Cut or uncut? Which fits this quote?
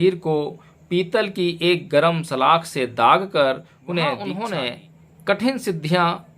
cut